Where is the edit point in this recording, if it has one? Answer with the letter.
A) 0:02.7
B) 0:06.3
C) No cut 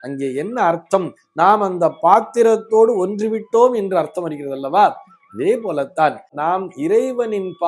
B